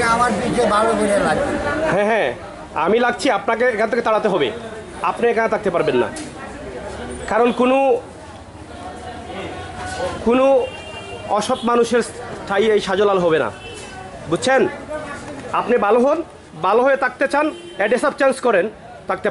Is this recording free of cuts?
yes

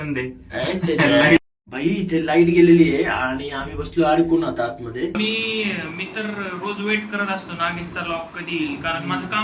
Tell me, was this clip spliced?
yes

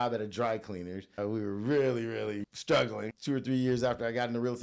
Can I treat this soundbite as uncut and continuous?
no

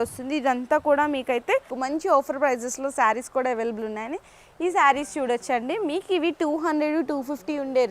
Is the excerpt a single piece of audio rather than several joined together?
no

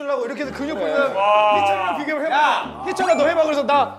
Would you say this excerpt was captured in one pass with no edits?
yes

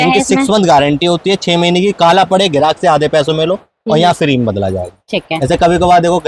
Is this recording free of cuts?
yes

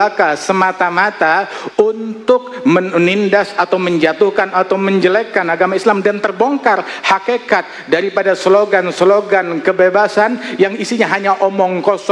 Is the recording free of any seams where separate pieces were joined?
yes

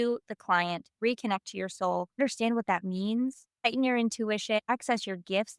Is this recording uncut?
no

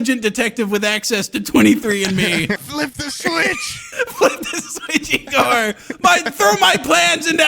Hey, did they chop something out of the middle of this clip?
yes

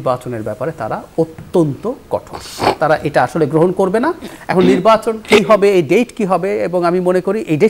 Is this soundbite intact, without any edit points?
yes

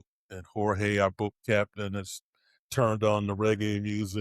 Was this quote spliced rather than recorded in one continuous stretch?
no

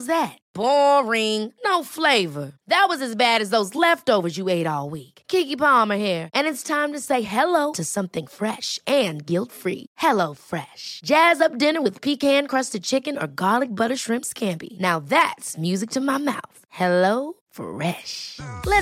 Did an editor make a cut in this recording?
no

